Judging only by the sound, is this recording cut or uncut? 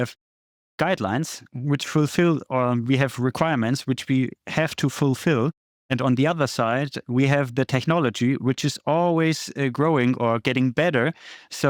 uncut